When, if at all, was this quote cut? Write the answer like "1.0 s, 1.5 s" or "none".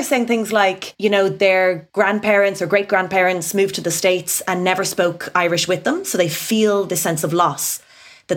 0.9 s, 1.8 s